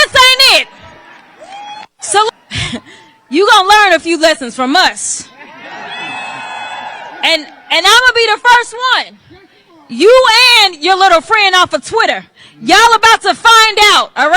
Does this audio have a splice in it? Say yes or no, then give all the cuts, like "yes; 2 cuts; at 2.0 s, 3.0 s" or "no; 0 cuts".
yes; 1 cut; at 2.3 s